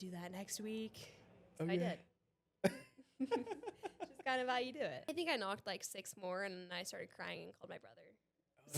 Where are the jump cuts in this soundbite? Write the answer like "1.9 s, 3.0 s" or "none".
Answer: 5.0 s